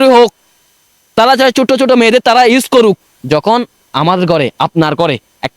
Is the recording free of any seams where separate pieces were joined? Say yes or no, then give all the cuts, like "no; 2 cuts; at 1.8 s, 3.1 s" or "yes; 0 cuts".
no; 1 cut; at 3.1 s